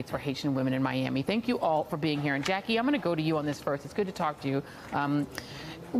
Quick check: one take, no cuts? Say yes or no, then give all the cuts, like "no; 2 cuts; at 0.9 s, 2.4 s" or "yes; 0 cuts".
yes; 0 cuts